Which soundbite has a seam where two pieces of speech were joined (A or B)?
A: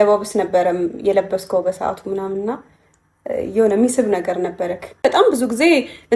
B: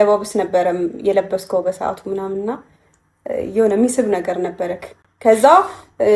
A